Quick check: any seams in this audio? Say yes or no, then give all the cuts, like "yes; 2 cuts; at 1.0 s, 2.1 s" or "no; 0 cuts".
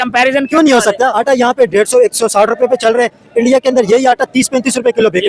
yes; 1 cut; at 1.1 s